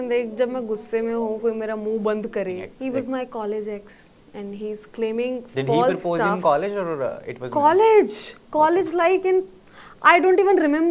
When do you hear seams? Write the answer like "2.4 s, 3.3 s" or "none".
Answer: 2.6 s